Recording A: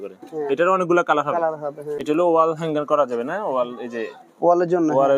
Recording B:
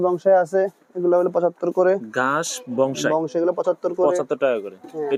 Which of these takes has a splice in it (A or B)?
A